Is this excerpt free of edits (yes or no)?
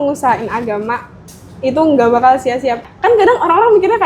no